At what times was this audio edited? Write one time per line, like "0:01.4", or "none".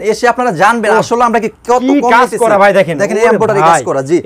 none